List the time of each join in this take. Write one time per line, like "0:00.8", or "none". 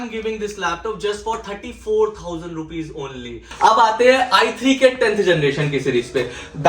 0:03.4